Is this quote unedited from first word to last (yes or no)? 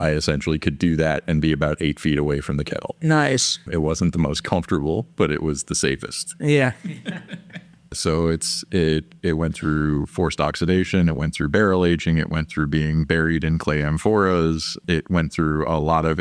no